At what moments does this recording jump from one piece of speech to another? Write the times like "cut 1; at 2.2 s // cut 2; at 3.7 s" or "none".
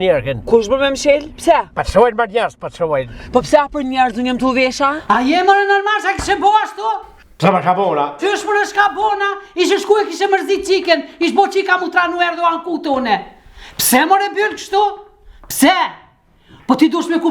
cut 1; at 5.0 s